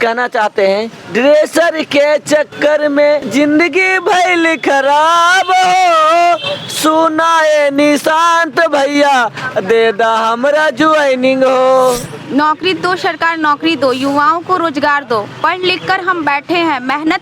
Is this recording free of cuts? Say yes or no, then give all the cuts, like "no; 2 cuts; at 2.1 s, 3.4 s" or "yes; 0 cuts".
no; 3 cuts; at 1.0 s, 3.3 s, 12.1 s